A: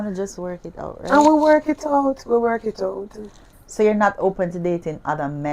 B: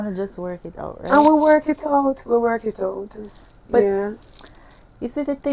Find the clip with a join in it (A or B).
A